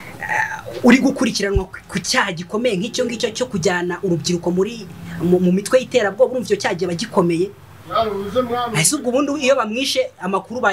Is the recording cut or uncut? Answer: uncut